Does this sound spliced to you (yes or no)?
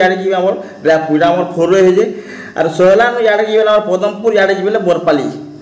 no